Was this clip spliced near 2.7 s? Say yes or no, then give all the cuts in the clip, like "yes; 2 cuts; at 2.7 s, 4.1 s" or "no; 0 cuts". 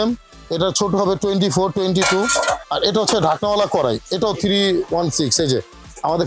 yes; 1 cut; at 2.7 s